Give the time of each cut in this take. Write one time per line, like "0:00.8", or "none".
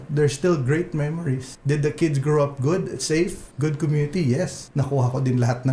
0:01.5
0:03.4
0:04.6